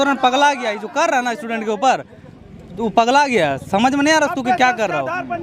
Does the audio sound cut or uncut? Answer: uncut